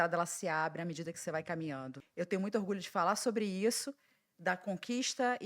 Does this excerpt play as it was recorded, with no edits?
no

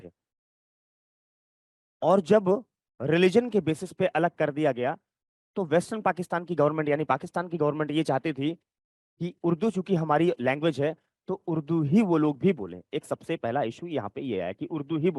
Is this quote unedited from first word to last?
yes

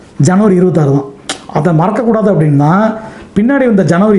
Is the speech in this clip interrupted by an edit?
no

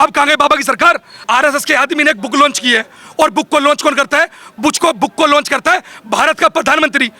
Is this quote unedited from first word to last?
no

